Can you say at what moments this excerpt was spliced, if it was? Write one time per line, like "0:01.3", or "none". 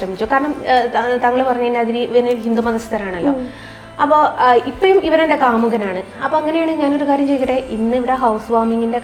none

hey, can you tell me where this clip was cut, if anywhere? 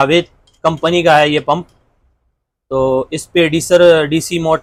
none

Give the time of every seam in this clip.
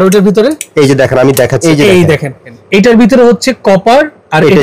0:01.6
0:02.6

